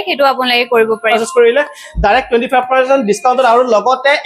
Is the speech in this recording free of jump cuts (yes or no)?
no